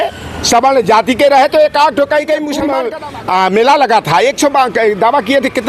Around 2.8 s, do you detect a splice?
yes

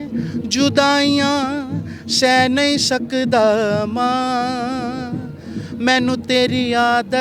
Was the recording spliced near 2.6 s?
no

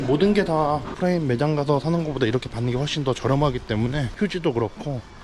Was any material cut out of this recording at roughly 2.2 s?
no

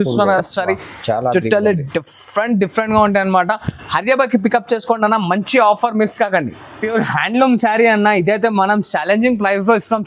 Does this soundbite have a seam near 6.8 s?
yes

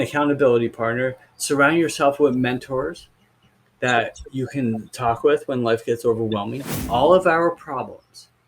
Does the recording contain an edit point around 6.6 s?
yes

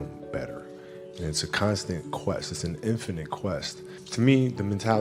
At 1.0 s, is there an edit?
no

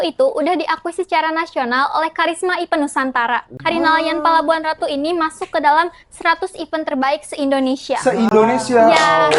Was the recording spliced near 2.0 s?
no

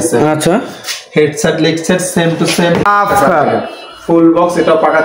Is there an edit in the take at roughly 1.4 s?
no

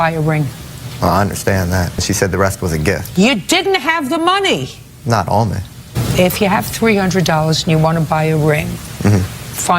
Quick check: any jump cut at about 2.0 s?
yes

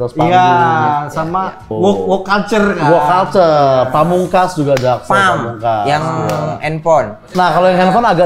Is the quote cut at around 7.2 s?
yes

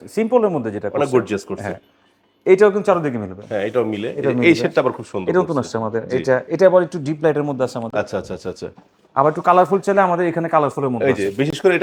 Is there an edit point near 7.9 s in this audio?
no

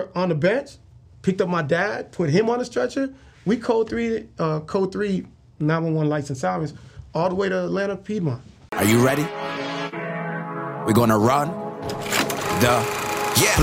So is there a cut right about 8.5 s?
yes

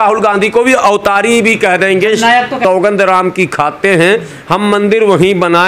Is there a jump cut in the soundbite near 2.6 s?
yes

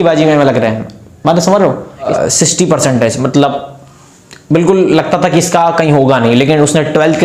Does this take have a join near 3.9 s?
no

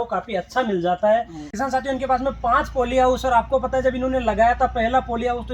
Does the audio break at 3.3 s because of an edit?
no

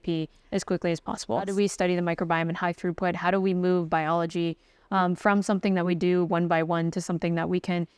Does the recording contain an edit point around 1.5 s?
yes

